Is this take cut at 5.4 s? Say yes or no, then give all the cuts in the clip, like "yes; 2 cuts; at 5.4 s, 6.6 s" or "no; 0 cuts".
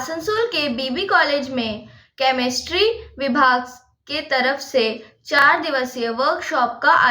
yes; 1 cut; at 5.4 s